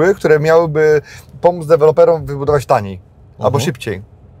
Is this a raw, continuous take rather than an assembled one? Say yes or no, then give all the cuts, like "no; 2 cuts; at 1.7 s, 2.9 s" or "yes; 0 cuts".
yes; 0 cuts